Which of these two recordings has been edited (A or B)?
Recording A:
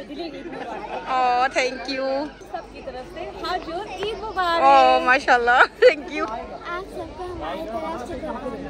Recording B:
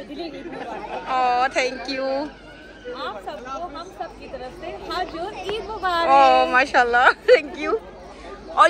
A